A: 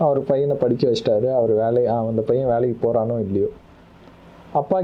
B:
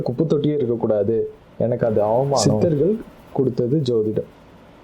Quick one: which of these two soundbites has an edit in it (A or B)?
B